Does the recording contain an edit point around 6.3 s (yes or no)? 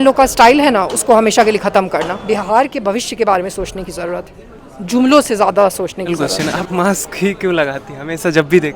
yes